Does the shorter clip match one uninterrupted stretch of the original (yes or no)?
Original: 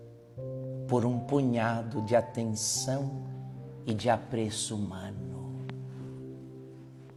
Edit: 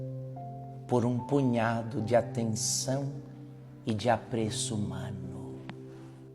no